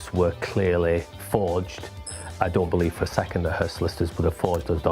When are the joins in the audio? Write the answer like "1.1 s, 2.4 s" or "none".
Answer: 2.3 s